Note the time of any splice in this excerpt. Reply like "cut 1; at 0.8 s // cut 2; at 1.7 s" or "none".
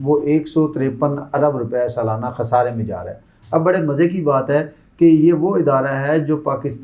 none